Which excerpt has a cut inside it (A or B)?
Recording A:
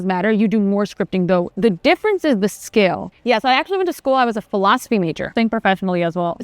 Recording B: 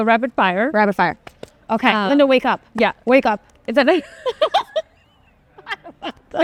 A